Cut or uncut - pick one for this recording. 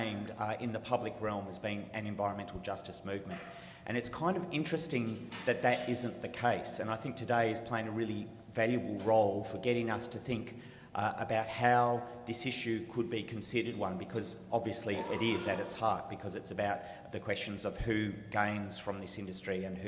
uncut